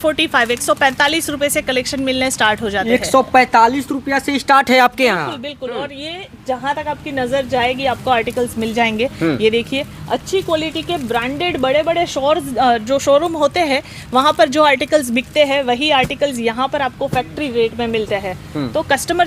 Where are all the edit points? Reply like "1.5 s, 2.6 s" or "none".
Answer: none